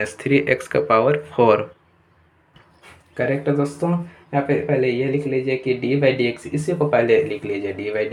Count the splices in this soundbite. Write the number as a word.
zero